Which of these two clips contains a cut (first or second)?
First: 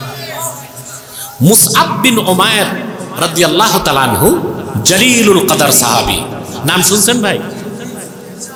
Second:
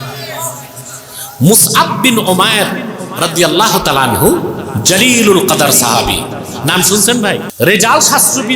second